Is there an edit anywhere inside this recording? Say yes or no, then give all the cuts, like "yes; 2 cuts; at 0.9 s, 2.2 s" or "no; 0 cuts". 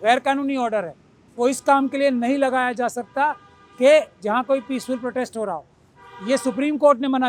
no; 0 cuts